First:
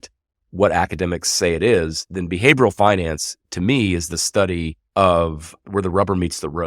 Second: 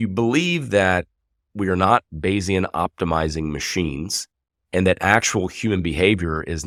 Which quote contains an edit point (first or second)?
first